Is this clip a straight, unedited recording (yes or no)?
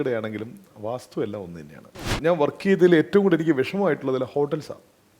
no